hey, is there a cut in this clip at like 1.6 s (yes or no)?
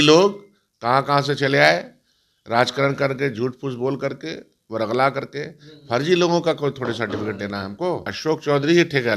no